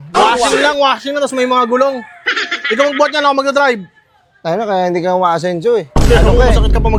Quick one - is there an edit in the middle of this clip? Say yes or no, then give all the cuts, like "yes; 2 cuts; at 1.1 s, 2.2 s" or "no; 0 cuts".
no; 0 cuts